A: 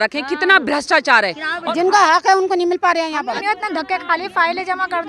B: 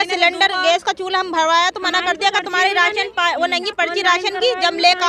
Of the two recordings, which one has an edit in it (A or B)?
A